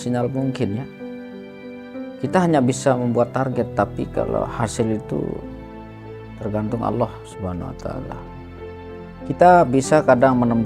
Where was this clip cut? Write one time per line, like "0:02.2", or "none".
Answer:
0:00.8
0:02.2